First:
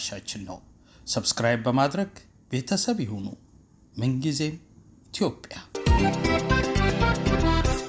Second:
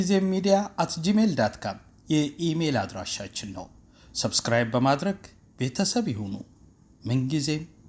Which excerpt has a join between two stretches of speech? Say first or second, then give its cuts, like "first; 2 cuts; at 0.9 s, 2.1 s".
first; 1 cut; at 5.8 s